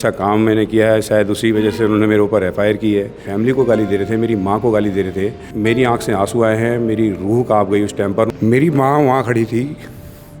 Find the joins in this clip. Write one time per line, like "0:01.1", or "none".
0:03.3
0:05.4
0:08.3